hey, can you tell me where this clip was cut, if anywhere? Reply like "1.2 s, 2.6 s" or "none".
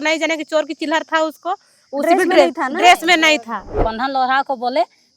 3.9 s

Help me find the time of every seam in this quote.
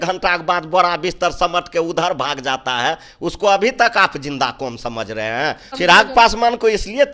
5.7 s

